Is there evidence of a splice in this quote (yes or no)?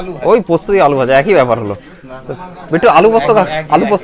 no